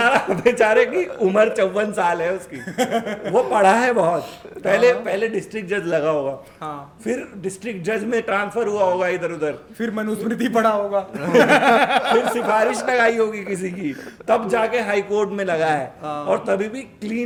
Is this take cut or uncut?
uncut